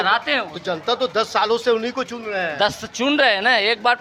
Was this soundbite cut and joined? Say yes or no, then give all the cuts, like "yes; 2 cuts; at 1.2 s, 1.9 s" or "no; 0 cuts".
no; 0 cuts